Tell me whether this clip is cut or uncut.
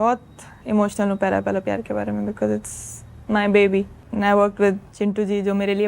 cut